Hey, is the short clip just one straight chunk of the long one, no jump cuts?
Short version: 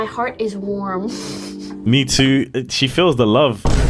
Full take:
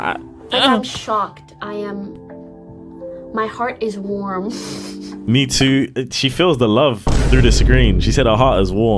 yes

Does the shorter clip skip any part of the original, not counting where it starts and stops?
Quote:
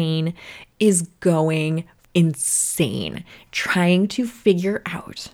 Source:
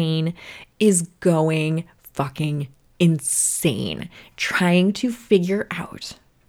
yes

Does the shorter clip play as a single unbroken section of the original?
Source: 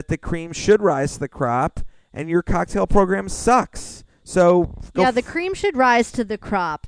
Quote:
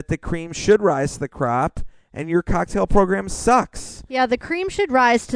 no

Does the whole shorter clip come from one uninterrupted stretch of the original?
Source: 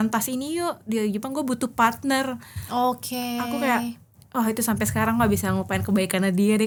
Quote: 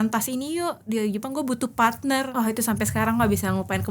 no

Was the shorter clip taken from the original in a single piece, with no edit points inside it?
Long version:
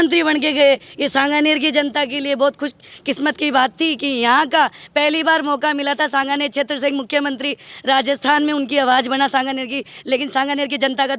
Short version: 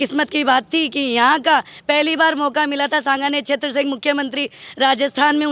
yes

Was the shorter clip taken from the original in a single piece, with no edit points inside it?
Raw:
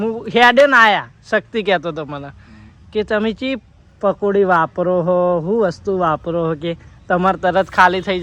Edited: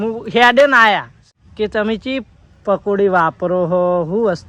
no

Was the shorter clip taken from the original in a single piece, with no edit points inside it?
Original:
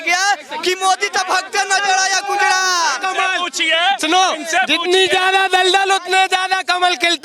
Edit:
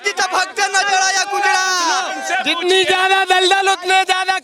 no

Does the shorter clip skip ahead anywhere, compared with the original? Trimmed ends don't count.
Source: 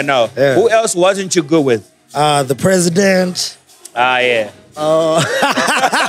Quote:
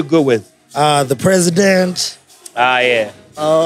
no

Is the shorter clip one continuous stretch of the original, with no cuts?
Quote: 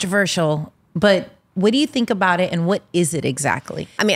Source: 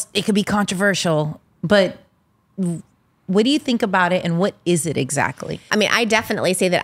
no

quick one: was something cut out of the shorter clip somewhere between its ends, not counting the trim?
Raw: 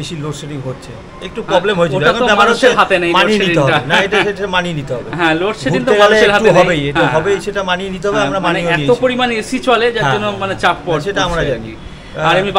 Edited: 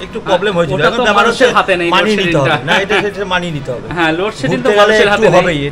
no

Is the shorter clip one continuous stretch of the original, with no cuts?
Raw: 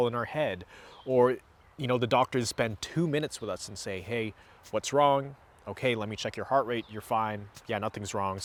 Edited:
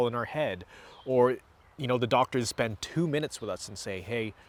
yes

